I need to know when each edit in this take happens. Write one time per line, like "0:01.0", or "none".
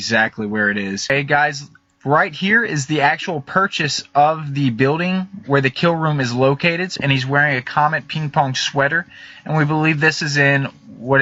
none